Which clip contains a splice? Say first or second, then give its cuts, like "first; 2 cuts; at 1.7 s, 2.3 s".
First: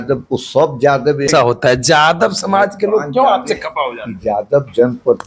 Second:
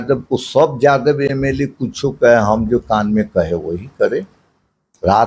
first; 1 cut; at 1.3 s